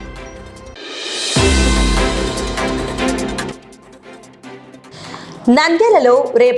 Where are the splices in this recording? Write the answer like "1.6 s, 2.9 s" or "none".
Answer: none